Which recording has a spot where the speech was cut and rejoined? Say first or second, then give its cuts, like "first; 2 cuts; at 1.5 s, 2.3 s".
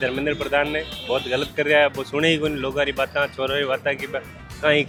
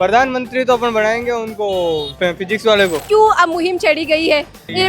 second; 1 cut; at 3.0 s